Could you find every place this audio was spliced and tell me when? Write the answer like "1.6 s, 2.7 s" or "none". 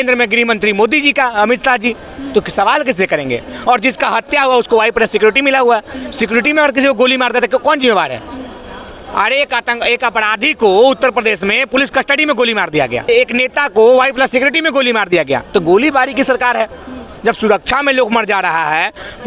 none